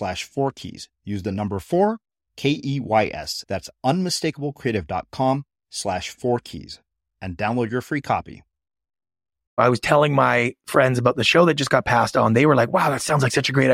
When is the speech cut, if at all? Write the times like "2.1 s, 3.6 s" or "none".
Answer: 9.6 s